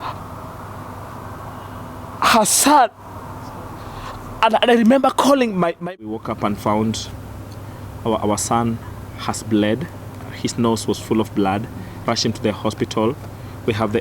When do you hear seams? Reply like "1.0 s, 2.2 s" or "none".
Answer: 5.8 s